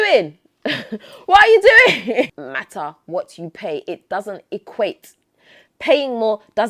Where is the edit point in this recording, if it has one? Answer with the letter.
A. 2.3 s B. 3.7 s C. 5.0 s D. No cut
A